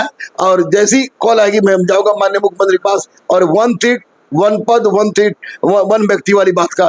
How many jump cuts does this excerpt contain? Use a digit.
0